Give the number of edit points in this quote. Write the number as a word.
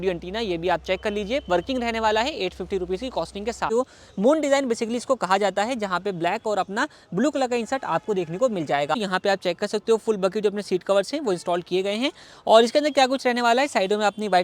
two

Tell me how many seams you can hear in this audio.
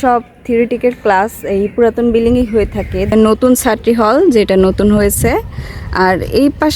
one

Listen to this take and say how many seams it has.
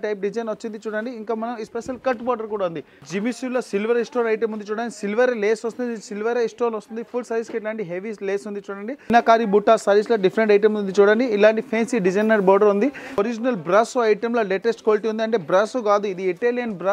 three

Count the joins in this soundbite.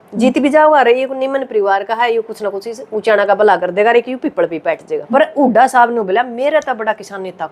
one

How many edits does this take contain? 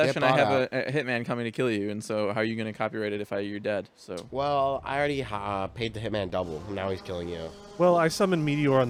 zero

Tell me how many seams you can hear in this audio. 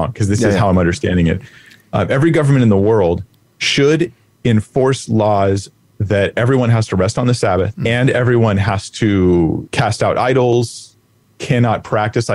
two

